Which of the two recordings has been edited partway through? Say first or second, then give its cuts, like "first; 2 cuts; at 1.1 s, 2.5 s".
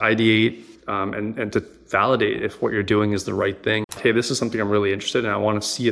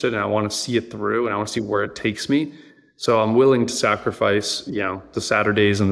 first; 1 cut; at 4.0 s